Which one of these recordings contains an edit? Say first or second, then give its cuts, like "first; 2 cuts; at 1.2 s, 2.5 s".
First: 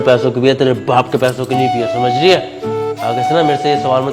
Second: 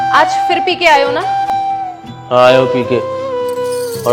second; 1 cut; at 1.5 s